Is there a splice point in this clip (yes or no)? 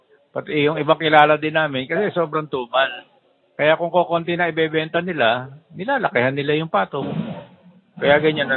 no